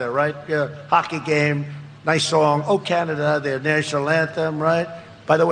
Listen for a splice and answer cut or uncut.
cut